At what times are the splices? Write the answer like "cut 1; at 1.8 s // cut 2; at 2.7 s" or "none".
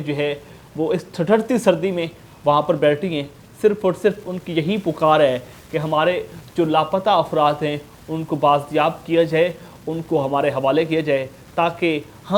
none